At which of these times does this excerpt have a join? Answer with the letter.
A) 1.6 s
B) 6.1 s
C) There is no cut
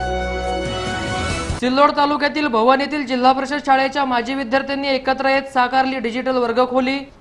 A